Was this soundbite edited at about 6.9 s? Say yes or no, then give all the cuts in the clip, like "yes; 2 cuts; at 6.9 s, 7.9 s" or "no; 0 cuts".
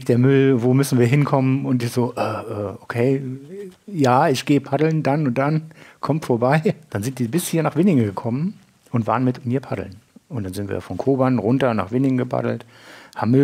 yes; 1 cut; at 6.9 s